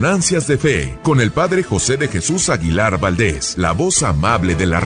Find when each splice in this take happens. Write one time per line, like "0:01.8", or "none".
0:00.9
0:03.4